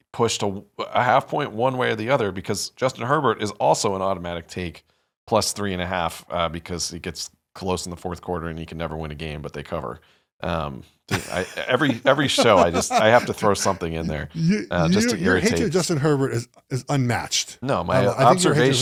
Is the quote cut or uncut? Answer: uncut